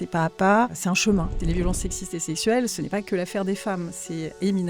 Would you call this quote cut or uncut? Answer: cut